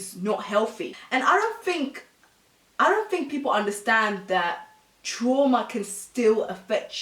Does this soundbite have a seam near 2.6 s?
no; 1 cut; at 0.9 s

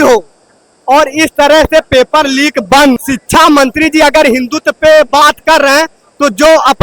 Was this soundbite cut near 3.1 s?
yes; 1 cut; at 3.1 s

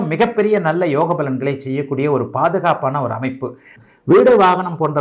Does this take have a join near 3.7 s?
yes; 1 cut; at 3.7 s

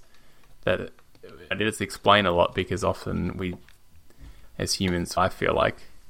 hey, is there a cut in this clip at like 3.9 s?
no; 2 cuts; at 1.5 s, 5.2 s

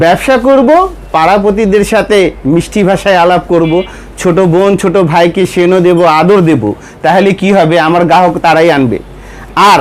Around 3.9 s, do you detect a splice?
no; 0 cuts

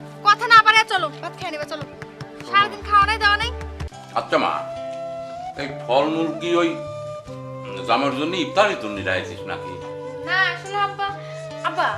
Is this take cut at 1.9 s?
no; 1 cut; at 3.9 s

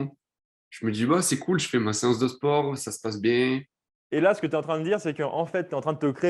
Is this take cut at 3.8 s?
yes; 1 cut; at 3.8 s

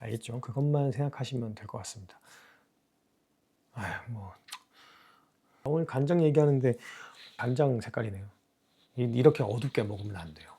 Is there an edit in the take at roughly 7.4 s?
yes; 2 cuts; at 5.5 s, 7.4 s

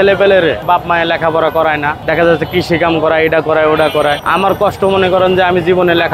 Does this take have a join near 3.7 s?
no; 0 cuts

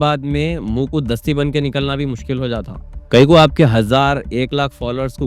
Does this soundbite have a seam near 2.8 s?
yes; 1 cut; at 2.8 s

